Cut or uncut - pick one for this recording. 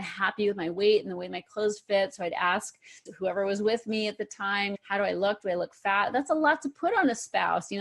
uncut